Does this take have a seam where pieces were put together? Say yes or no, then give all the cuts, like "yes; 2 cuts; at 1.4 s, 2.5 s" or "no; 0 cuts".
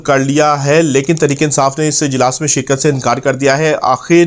no; 0 cuts